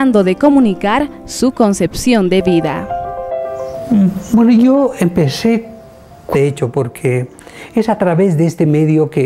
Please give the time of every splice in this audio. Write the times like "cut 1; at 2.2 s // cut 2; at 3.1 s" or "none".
none